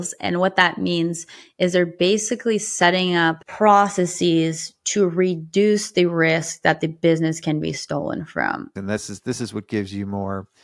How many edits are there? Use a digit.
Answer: 1